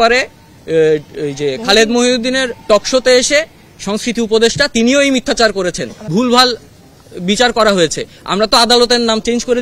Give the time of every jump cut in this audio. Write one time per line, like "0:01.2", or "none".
0:05.9